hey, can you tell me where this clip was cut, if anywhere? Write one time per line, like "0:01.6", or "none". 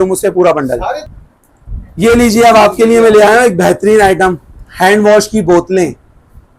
0:01.1